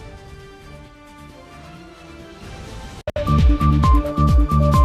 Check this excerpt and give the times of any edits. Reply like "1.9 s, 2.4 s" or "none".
3.1 s